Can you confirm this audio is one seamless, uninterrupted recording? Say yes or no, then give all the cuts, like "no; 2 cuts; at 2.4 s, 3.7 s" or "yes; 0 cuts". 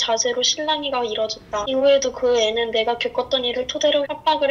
yes; 0 cuts